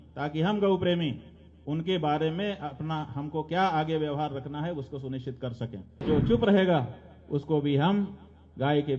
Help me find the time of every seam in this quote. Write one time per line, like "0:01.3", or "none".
0:06.2